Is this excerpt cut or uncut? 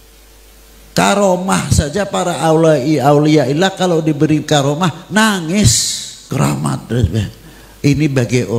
cut